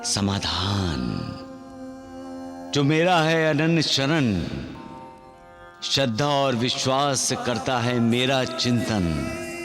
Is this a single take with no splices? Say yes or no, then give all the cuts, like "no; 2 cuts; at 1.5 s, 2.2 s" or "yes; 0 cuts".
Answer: yes; 0 cuts